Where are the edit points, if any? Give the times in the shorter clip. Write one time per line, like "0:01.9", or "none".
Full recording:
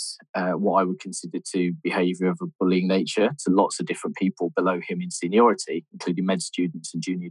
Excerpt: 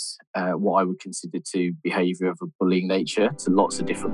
none